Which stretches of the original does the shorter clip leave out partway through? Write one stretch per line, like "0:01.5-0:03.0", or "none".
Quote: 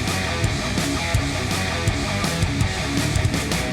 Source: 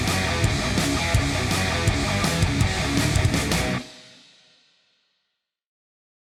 none